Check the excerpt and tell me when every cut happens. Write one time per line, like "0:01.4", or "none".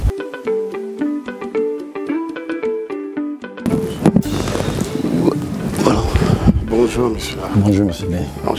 none